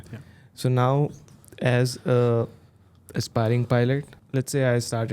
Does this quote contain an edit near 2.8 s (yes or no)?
no